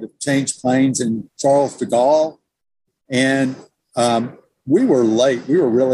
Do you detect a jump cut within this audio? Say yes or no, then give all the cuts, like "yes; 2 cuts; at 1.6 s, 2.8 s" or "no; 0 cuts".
no; 0 cuts